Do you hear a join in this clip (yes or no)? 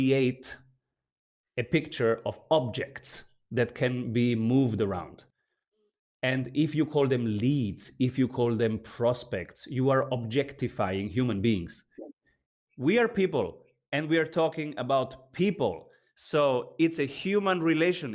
yes